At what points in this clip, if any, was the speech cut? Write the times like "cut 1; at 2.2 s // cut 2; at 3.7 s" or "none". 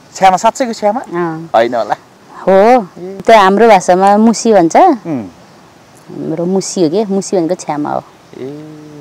cut 1; at 3.2 s